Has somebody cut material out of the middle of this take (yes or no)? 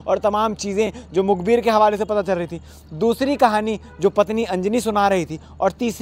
no